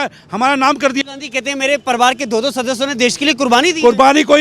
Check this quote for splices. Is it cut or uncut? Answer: cut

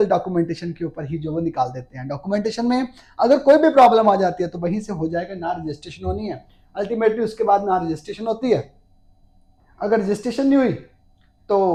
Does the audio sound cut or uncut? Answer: uncut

